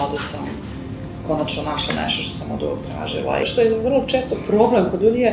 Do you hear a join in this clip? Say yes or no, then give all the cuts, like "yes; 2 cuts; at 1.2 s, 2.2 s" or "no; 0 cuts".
yes; 1 cut; at 3.5 s